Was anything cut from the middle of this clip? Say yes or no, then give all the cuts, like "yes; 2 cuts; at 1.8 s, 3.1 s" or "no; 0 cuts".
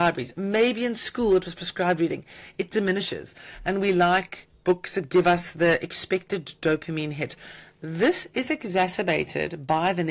no; 0 cuts